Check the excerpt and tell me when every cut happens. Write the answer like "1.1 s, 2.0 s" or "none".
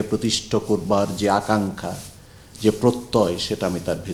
none